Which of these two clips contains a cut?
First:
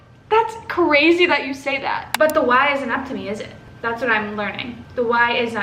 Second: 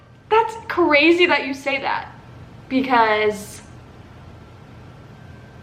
first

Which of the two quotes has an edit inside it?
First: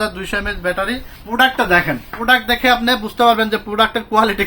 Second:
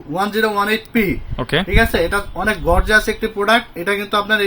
first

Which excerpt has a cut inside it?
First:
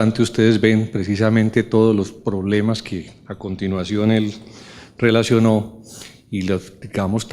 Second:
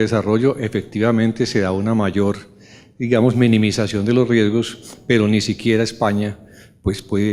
first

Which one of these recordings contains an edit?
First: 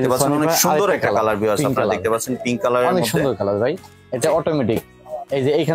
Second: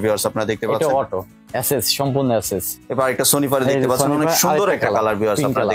second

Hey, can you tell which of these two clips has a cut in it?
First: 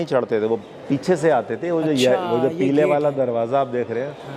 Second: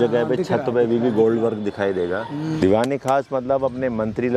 second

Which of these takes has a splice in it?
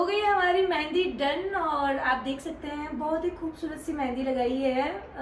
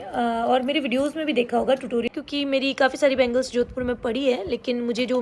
second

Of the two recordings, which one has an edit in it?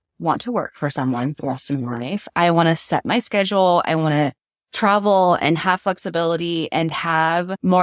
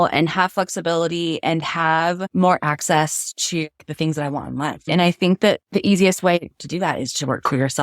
second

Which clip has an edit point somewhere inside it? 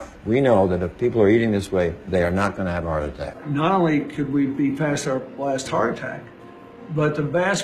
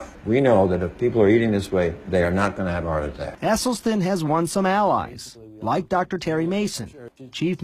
first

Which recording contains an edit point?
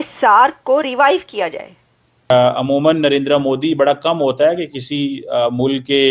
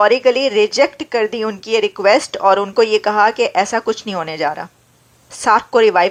first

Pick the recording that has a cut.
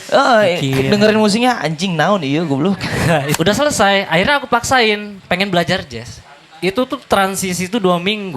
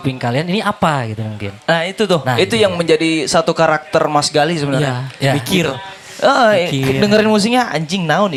first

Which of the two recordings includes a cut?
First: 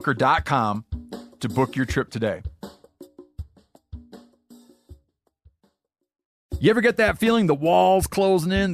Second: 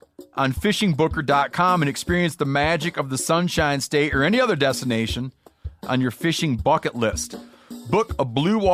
first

